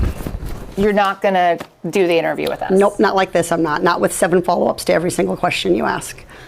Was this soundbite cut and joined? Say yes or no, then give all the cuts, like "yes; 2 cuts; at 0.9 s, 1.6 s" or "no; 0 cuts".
no; 0 cuts